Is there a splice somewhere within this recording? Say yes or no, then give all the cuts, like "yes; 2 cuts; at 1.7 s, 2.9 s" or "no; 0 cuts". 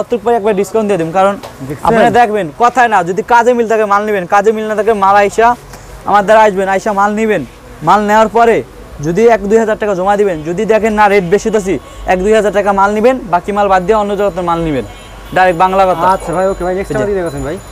no; 0 cuts